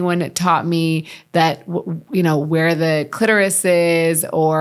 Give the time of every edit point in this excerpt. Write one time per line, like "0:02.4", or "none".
none